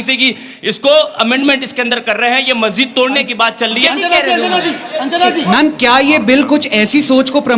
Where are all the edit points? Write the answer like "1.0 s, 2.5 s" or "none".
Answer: 3.8 s, 5.5 s

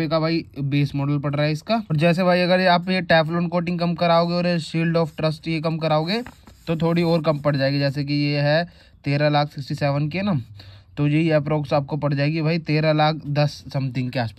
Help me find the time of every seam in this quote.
none

